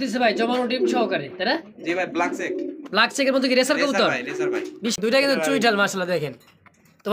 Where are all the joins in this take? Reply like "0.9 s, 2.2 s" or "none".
5.0 s